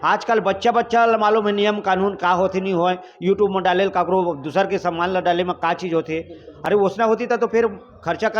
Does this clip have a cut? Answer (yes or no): no